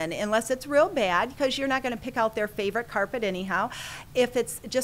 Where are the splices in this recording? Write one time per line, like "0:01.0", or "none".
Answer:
none